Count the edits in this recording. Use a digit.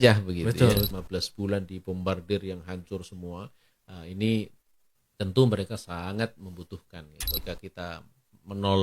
2